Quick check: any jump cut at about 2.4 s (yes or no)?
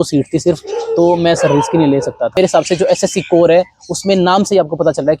yes